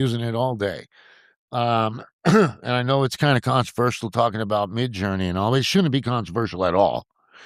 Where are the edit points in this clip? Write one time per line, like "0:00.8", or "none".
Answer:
none